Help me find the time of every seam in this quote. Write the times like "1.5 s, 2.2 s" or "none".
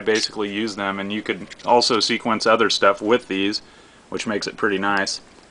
none